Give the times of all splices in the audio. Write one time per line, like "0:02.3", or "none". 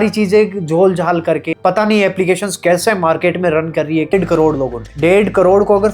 0:04.1

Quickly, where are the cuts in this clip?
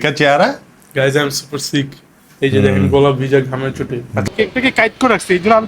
0:04.3

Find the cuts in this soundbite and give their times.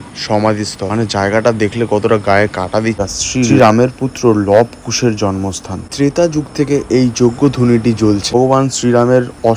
0:03.1
0:05.8
0:08.3

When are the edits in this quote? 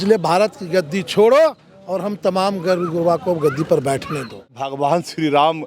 0:04.6

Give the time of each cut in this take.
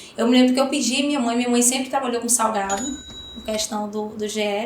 0:03.1

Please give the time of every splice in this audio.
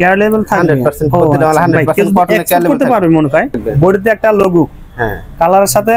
0:03.5

